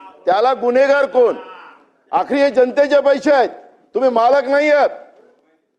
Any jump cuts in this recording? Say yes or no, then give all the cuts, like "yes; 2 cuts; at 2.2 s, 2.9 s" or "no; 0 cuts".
no; 0 cuts